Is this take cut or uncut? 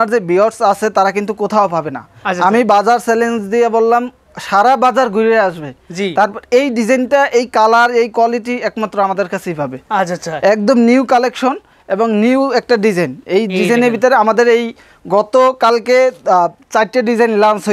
uncut